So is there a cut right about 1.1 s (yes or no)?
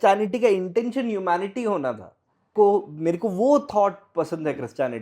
no